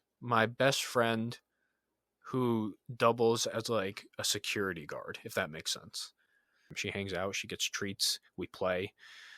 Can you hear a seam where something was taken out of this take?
yes; 1 cut; at 6.6 s

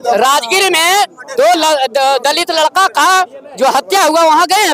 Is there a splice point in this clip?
no; 0 cuts

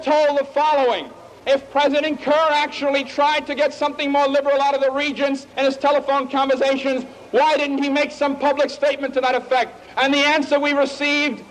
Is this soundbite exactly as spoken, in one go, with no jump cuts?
no; 1 cut; at 2.4 s

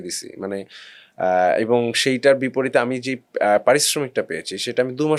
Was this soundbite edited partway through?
no; 0 cuts

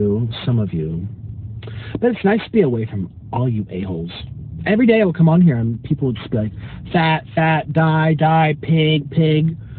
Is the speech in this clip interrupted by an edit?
no; 0 cuts

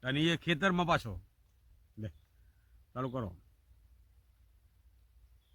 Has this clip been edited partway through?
no; 0 cuts

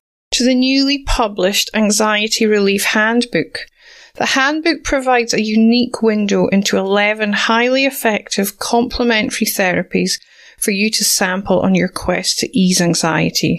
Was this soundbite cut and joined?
no; 0 cuts

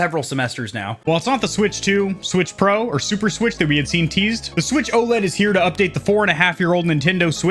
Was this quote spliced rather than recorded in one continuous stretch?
yes; 1 cut; at 1.0 s

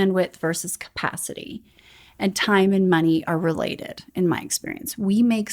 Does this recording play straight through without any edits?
yes; 0 cuts

